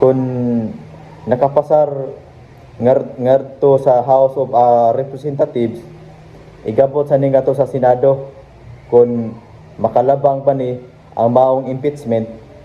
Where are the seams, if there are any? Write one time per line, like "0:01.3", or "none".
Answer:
none